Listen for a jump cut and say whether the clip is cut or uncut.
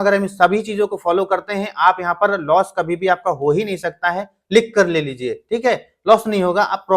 uncut